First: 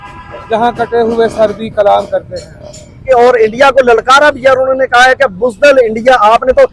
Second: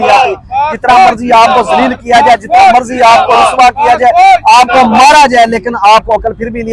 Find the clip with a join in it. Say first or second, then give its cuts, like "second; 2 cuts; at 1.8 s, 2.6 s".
first; 1 cut; at 3.0 s